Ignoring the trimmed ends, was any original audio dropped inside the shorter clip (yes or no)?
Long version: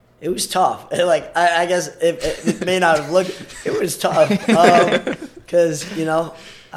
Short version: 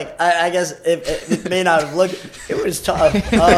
no